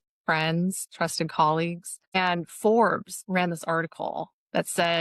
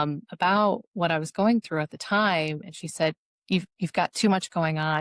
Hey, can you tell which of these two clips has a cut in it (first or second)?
first